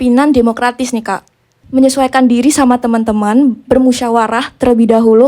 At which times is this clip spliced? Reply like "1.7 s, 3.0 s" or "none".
1.6 s